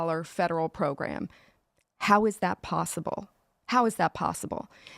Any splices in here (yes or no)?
yes